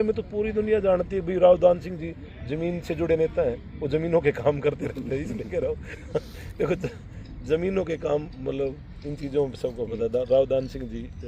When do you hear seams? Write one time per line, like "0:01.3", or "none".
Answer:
none

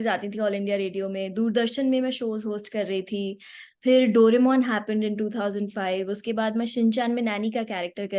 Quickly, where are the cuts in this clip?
none

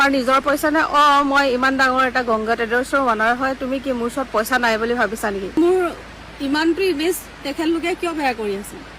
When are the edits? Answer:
0:05.6

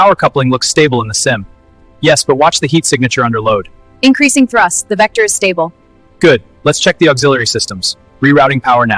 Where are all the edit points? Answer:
none

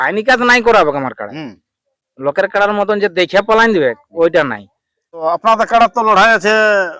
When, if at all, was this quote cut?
0:05.2

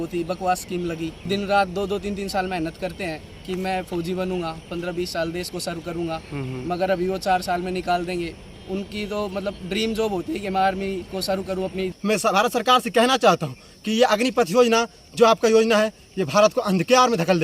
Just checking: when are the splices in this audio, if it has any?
0:01.3
0:11.9

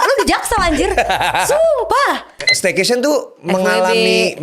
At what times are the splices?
0:02.5

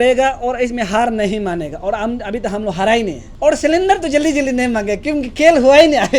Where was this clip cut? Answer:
0:03.2

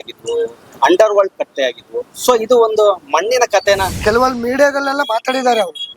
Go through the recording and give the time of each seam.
0:03.9

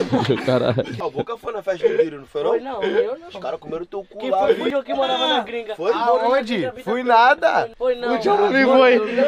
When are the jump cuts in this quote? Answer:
0:01.0
0:04.7
0:07.7

